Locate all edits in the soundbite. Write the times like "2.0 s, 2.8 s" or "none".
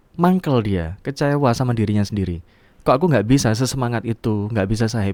none